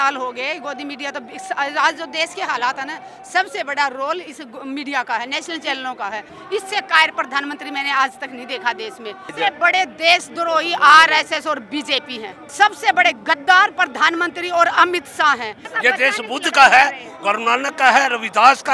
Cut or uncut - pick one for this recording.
cut